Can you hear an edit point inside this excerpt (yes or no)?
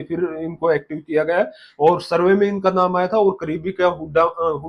no